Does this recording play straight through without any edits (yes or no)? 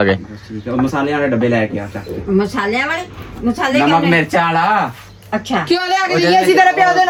yes